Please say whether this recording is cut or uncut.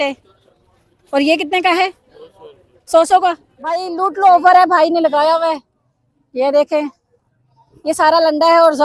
cut